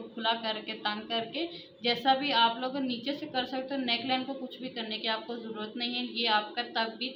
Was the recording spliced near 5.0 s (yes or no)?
no